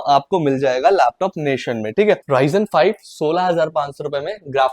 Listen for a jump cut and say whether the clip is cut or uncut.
cut